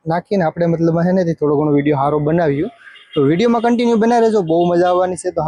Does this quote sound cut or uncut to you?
uncut